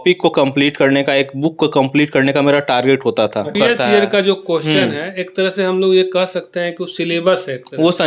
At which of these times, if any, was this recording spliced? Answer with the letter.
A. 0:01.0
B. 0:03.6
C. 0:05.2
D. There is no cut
B